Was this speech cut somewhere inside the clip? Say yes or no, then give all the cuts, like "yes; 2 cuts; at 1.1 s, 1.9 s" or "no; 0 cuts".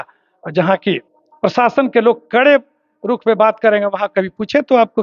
no; 0 cuts